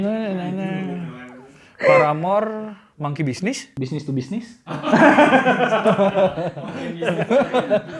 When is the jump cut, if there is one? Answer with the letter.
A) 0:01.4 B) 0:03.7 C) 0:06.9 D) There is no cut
B